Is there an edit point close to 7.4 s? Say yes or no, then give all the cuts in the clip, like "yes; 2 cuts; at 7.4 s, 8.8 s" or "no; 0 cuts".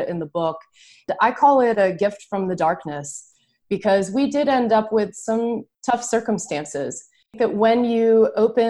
yes; 2 cuts; at 5.7 s, 7.4 s